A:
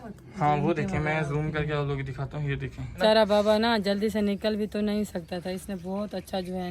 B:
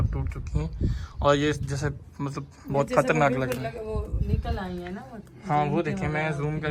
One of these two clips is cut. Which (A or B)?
A